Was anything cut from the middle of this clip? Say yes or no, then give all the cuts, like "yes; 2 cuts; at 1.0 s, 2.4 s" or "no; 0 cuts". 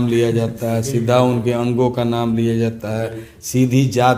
no; 0 cuts